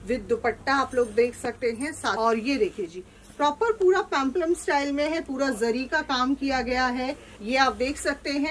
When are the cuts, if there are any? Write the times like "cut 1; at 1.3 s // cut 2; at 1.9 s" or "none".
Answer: cut 1; at 2.1 s // cut 2; at 7.3 s